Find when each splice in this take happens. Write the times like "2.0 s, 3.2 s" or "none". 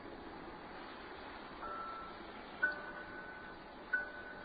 1.8 s